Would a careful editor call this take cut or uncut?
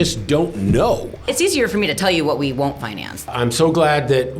cut